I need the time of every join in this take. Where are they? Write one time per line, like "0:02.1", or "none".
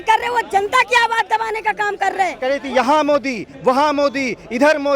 0:02.5